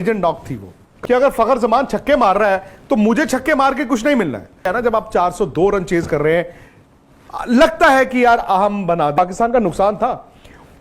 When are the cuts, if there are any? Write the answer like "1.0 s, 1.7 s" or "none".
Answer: 0.9 s, 4.6 s, 9.2 s